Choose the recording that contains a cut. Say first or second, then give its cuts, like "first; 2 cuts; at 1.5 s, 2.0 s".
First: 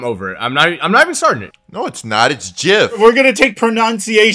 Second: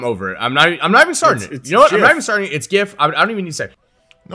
first; 2 cuts; at 1.5 s, 3.0 s